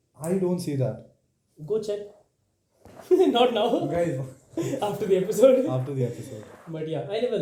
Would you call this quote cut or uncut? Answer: uncut